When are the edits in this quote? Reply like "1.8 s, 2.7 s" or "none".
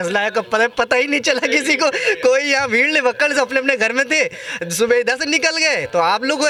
none